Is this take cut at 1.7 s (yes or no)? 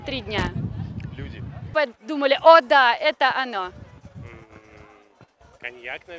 yes